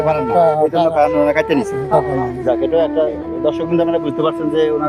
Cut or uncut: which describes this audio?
uncut